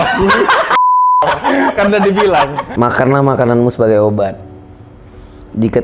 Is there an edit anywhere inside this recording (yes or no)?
yes